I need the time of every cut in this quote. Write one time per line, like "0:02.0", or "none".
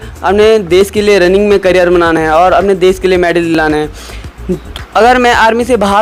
none